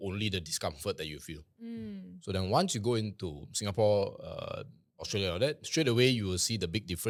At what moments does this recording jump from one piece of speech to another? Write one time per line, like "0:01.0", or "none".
none